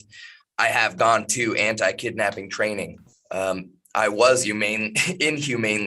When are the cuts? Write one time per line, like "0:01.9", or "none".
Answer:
none